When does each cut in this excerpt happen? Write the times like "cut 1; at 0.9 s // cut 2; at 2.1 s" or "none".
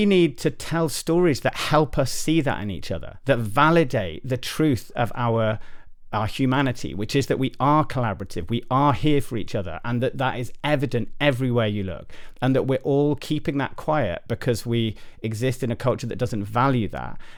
none